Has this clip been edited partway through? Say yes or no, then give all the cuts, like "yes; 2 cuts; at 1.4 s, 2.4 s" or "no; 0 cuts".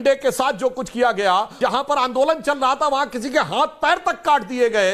yes; 1 cut; at 1.5 s